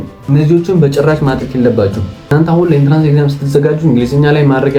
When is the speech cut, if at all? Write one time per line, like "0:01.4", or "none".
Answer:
0:02.3